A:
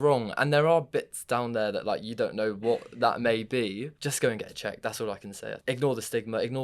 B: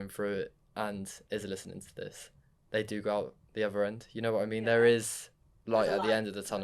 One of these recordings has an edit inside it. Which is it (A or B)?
A